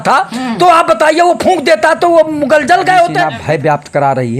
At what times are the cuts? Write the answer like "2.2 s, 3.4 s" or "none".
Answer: 3.3 s